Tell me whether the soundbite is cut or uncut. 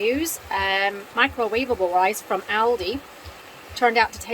cut